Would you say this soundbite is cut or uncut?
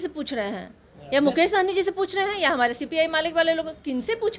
uncut